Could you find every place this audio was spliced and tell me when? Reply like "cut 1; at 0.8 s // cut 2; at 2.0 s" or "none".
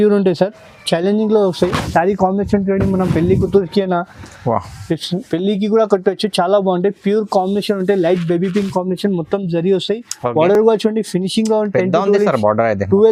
none